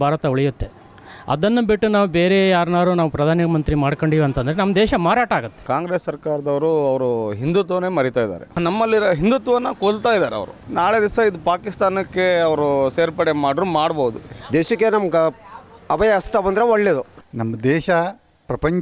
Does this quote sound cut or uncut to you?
cut